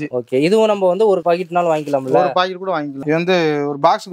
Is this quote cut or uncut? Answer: cut